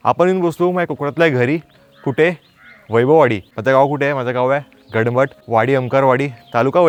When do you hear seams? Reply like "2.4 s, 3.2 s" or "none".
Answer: none